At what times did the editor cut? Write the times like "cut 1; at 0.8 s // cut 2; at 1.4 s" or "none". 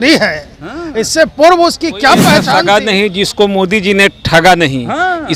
cut 1; at 2.5 s